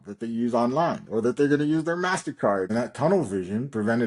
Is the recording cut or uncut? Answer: cut